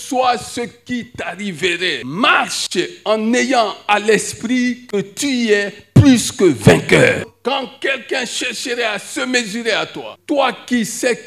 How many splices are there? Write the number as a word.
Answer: three